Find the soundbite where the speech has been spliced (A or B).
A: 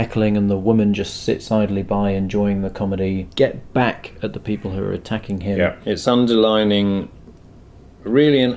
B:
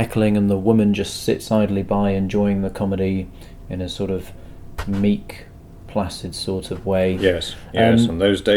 A